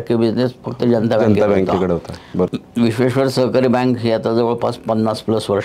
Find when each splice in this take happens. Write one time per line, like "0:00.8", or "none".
0:02.5